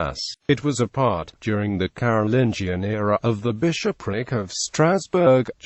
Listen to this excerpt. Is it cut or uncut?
cut